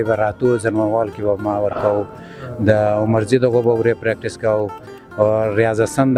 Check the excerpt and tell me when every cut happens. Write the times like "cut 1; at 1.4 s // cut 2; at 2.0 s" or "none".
none